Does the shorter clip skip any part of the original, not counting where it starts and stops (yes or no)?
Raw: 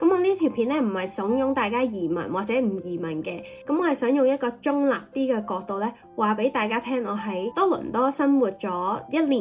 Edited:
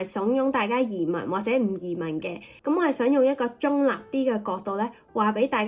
no